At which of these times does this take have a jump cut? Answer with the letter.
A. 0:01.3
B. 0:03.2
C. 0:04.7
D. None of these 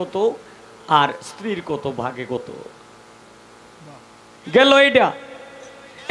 B